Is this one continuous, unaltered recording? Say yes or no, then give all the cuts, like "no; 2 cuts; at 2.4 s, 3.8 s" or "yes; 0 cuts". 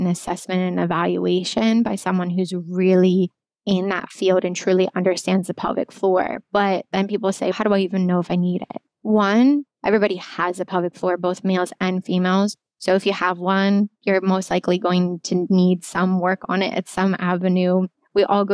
no; 1 cut; at 3.5 s